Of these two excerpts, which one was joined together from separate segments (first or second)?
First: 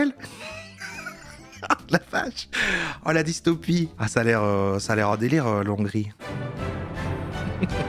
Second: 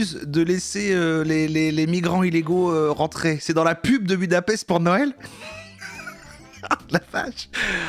first